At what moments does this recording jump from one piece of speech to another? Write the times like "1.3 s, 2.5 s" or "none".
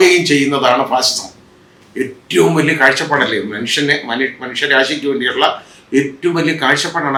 none